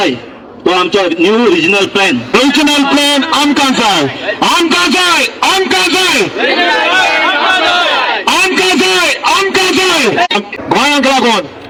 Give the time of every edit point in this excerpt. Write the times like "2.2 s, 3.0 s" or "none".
none